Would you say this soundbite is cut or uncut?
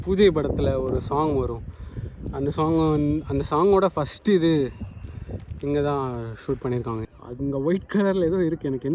cut